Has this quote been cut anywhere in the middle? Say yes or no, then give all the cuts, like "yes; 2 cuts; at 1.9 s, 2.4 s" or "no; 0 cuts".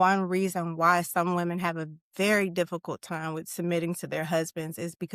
no; 0 cuts